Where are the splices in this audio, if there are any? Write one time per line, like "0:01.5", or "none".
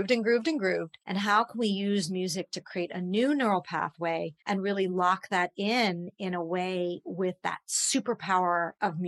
0:01.0
0:04.3